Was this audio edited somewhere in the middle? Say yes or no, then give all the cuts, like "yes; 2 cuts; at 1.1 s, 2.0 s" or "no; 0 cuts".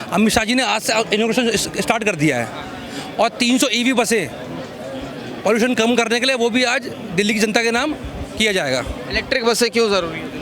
no; 0 cuts